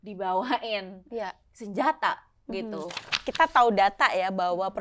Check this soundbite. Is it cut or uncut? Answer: cut